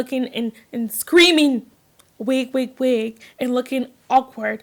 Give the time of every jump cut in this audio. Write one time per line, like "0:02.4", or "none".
none